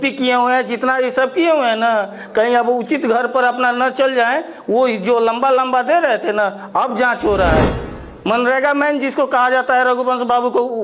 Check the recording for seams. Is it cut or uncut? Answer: cut